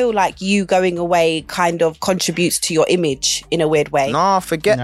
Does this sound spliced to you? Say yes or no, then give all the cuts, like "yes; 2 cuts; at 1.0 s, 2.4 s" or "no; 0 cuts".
no; 0 cuts